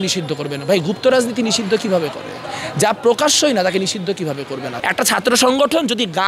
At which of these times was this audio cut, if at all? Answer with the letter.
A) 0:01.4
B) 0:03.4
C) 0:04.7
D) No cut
C